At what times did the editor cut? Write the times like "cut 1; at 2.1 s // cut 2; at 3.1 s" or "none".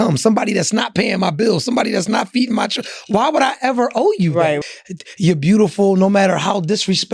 cut 1; at 4.6 s

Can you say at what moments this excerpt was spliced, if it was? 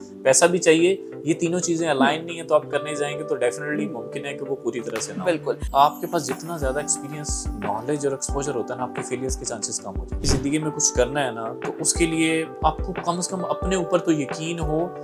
cut 1; at 5.6 s // cut 2; at 10.1 s

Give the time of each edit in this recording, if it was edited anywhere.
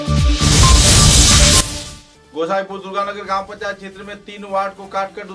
cut 1; at 1.7 s

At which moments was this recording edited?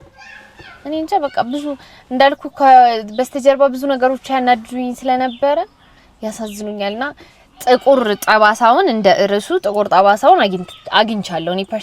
none

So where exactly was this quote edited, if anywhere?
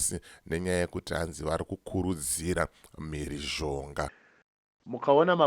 cut 1; at 4.2 s

